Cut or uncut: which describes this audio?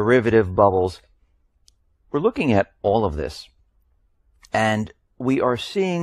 uncut